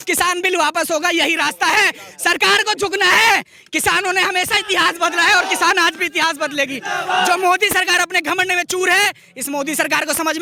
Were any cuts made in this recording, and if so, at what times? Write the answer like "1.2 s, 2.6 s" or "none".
none